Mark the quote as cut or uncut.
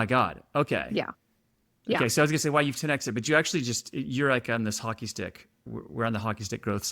cut